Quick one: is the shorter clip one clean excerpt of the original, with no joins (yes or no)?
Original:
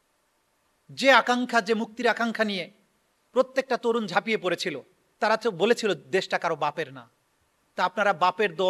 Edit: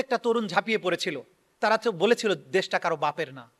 yes